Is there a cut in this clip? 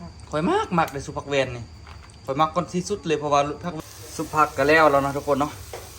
yes; 1 cut; at 3.8 s

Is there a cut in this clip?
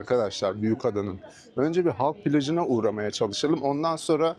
no; 0 cuts

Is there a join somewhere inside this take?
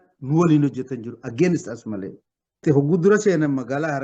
yes; 1 cut; at 2.6 s

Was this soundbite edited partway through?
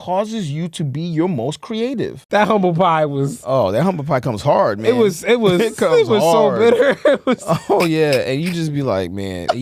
yes; 1 cut; at 2.2 s

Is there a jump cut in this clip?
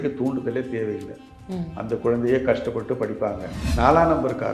yes; 1 cut; at 3.6 s

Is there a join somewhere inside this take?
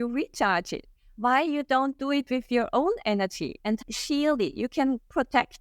yes; 1 cut; at 3.8 s

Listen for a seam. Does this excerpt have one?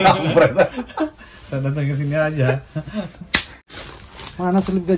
yes; 1 cut; at 3.7 s

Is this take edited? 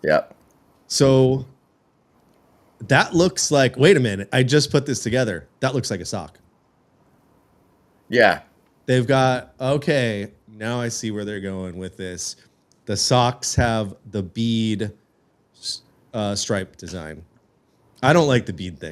no; 0 cuts

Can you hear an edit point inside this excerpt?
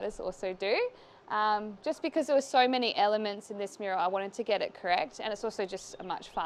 no; 0 cuts

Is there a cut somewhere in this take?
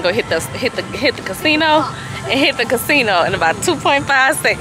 no; 0 cuts

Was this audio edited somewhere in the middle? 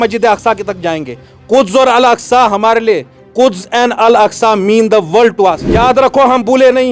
yes; 1 cut; at 5.7 s

